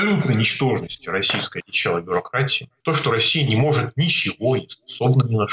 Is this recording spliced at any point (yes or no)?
yes